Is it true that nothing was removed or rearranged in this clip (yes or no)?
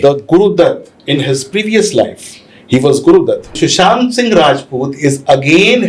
no